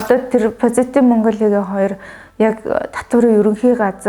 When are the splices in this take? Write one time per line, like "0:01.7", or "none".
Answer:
none